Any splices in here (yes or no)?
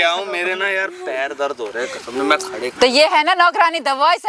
no